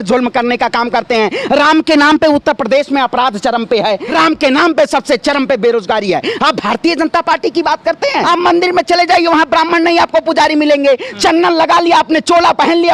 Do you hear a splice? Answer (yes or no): yes